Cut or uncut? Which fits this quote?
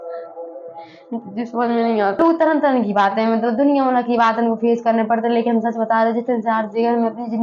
cut